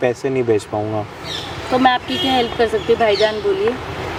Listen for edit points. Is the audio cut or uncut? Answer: uncut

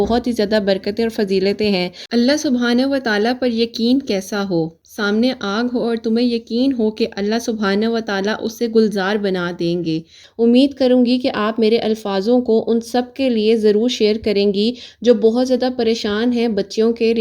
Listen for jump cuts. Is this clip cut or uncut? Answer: cut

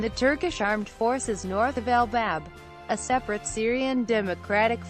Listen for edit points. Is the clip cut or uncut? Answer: uncut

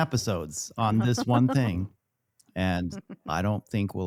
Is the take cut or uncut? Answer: uncut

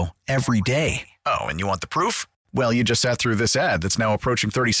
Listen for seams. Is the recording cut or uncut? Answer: uncut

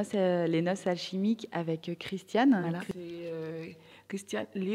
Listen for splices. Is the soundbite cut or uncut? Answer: cut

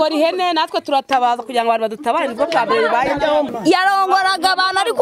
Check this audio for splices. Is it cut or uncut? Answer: cut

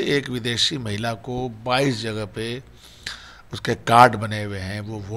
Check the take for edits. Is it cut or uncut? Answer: uncut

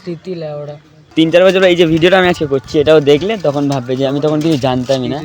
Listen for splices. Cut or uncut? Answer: cut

